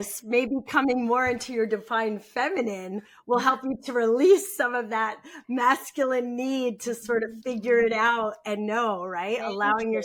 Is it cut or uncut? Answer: uncut